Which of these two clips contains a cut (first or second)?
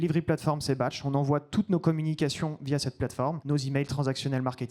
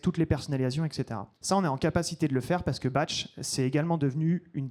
first